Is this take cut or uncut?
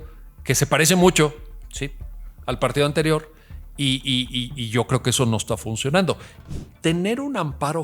cut